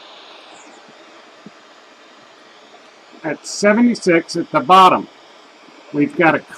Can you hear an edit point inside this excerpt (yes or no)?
yes